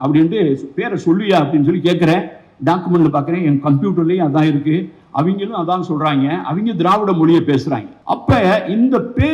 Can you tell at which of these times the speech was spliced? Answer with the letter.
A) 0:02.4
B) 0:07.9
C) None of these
B